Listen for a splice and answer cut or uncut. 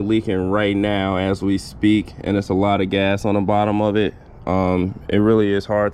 uncut